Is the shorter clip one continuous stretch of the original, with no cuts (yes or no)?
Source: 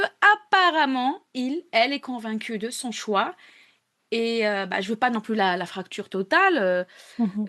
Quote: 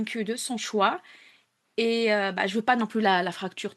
yes